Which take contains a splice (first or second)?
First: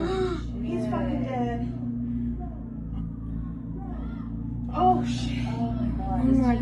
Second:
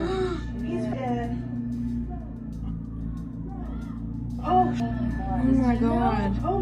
second